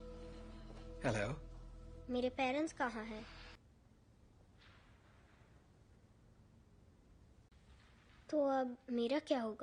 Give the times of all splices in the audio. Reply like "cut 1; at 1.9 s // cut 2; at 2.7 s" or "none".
cut 1; at 3.6 s